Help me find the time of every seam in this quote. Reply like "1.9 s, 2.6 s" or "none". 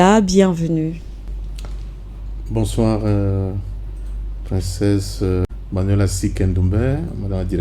5.5 s